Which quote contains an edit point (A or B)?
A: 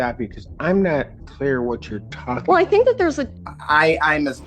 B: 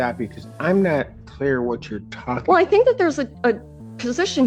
A